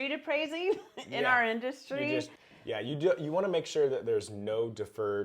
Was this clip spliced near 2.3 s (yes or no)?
yes